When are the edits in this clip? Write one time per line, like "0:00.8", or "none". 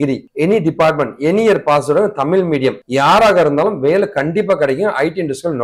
none

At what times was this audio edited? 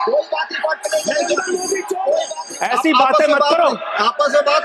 0:02.4

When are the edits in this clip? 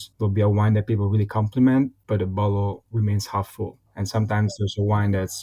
0:02.0
0:03.8

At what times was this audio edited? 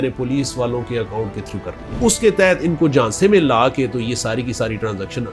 0:02.0

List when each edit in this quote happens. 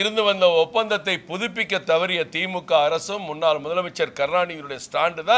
none

